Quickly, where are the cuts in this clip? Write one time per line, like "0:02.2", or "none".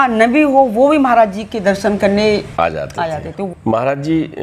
0:02.5
0:03.5